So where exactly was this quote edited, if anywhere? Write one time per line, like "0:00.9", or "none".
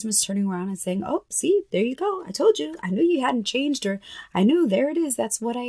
none